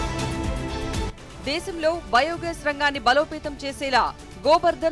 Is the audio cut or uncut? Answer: cut